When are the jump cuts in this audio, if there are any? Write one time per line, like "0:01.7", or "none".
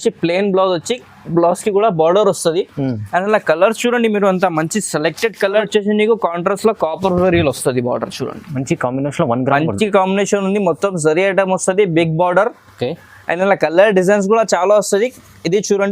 0:05.7